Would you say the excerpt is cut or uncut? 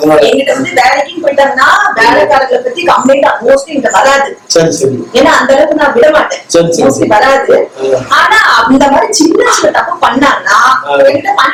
uncut